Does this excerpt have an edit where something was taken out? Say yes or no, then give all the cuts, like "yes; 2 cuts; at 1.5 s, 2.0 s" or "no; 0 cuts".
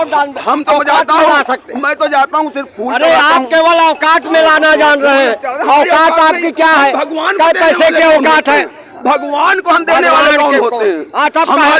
no; 0 cuts